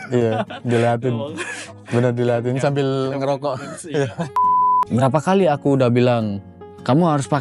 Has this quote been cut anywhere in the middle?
yes; 1 cut; at 4.5 s

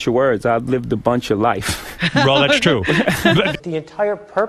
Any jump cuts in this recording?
yes; 1 cut; at 3.5 s

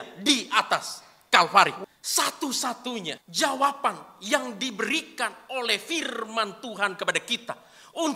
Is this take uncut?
no; 2 cuts; at 1.8 s, 3.2 s

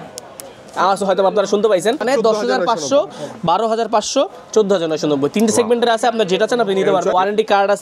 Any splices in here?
yes; 2 cuts; at 2.0 s, 7.1 s

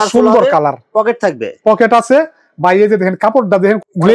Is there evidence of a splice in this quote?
no; 0 cuts

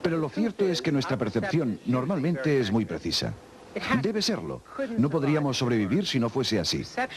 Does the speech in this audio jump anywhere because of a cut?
no; 0 cuts

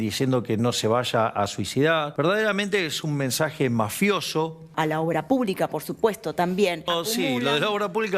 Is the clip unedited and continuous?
no; 3 cuts; at 2.1 s, 4.7 s, 6.9 s

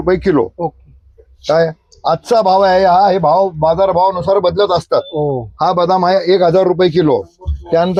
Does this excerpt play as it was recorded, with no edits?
yes; 0 cuts

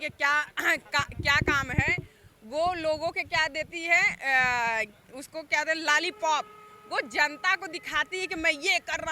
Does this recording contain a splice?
no; 0 cuts

